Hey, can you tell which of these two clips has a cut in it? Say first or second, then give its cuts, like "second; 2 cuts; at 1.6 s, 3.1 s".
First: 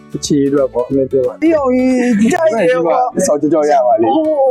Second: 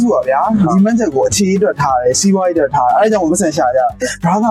first; 1 cut; at 1.4 s